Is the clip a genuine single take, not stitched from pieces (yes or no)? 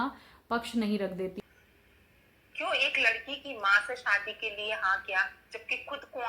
no